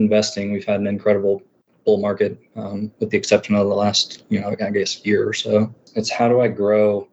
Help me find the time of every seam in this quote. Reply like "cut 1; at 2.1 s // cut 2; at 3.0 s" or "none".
cut 1; at 5.8 s